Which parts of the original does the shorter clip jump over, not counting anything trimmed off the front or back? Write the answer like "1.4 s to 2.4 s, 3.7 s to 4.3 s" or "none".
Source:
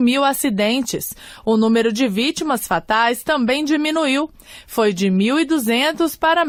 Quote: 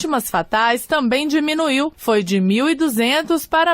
4.3 s to 4.7 s